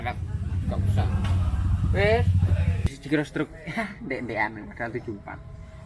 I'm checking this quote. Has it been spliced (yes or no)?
yes